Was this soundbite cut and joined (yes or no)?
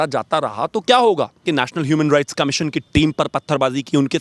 yes